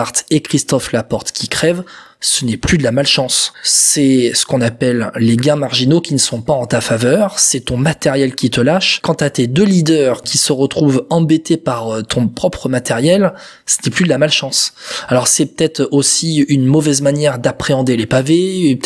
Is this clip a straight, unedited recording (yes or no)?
yes